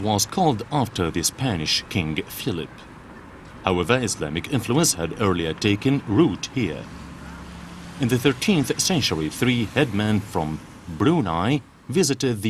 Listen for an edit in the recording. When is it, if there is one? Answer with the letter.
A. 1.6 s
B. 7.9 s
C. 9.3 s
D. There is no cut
A